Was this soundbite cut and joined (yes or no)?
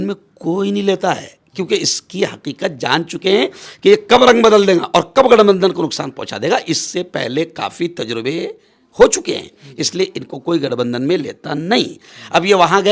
no